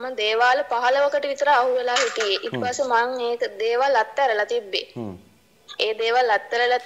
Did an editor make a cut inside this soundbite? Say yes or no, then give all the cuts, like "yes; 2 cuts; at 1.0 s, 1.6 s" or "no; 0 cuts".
no; 0 cuts